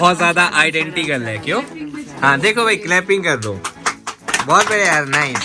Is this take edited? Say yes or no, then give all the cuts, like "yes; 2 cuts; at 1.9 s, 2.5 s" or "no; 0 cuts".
no; 0 cuts